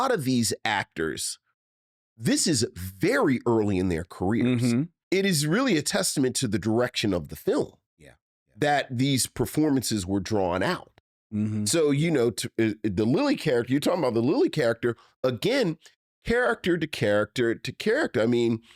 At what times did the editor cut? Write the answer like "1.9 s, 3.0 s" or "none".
5.0 s